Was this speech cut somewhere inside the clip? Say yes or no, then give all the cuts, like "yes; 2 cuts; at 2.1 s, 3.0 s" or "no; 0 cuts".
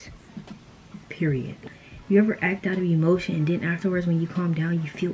yes; 1 cut; at 1.7 s